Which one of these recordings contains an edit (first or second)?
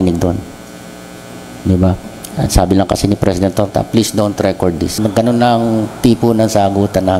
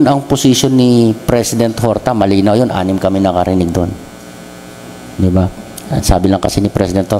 first